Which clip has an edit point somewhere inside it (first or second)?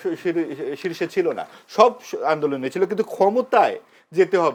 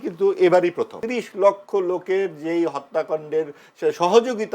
second